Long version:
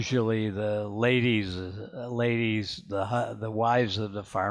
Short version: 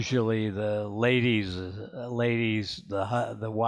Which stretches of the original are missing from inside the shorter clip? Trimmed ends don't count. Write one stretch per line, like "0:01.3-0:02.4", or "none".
none